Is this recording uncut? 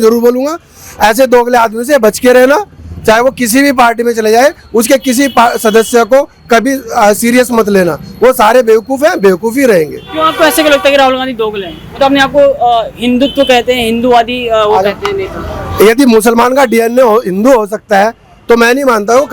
yes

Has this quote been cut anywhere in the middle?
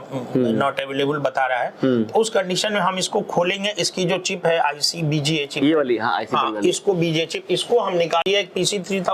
yes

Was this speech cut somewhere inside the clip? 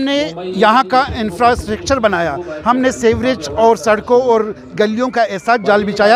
no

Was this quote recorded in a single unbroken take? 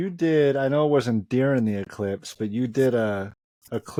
yes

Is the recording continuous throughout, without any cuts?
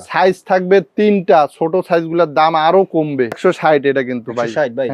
no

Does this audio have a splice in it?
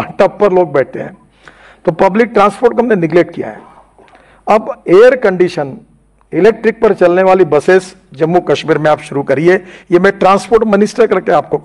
no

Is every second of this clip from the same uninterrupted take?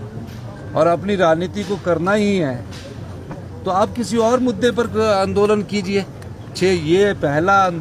no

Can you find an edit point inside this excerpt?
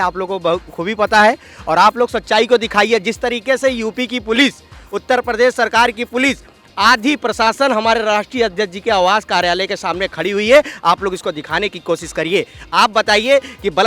no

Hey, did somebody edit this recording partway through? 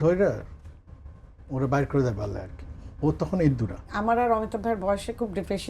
yes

